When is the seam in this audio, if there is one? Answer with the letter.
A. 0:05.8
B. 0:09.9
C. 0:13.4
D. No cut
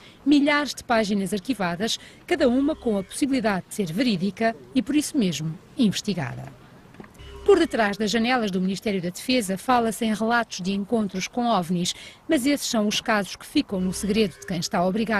A